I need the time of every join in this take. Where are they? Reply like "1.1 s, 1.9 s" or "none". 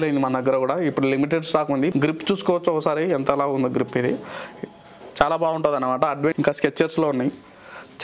1.9 s, 6.3 s